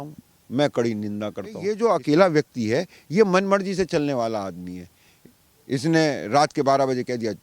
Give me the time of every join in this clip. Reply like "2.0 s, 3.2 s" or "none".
1.7 s